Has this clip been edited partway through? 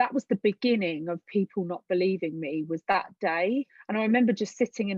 yes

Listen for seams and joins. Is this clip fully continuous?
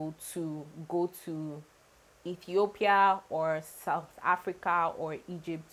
yes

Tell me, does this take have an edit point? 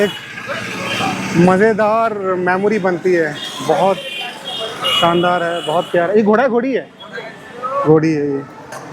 no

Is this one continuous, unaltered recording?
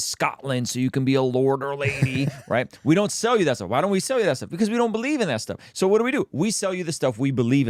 yes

